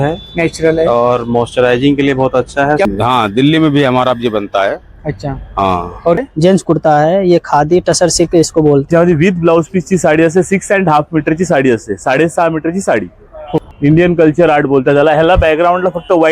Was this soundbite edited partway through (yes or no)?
yes